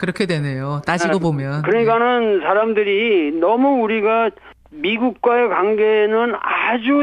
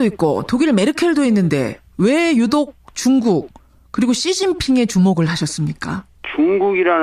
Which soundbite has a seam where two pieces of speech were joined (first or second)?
second